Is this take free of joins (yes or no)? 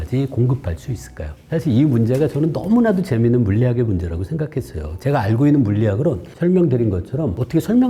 yes